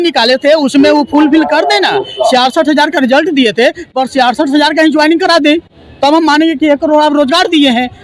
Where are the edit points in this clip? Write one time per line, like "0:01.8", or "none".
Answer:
none